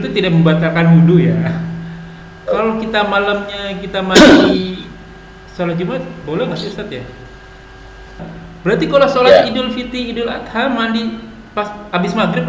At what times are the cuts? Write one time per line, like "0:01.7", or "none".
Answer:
0:08.2

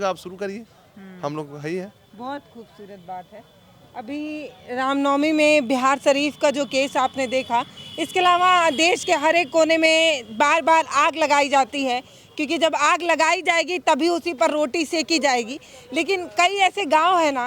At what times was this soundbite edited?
none

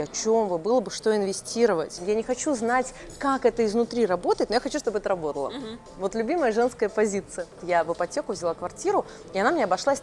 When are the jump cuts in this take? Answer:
0:02.0
0:07.6

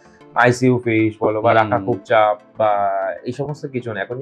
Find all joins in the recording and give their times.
none

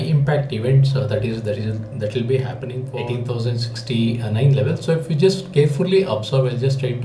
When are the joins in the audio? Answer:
0:02.9

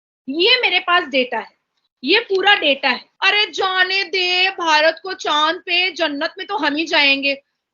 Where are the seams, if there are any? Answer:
0:03.1

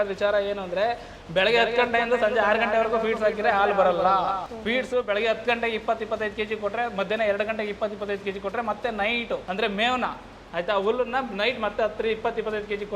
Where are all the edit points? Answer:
0:09.4

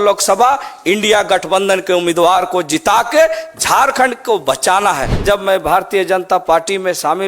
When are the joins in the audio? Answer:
0:05.1

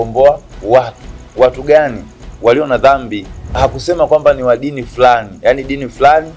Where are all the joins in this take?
0:03.6

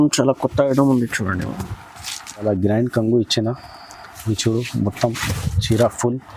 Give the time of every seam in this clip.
0:02.4

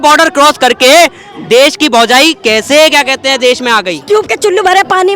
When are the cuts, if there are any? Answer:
0:03.9

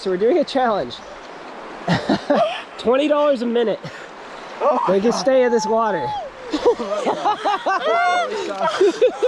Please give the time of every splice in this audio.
none

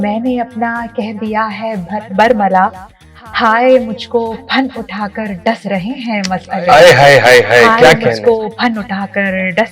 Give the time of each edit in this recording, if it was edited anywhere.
none

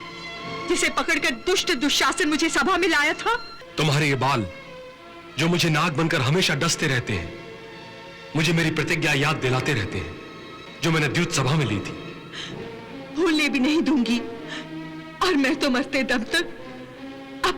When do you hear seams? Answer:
0:03.6

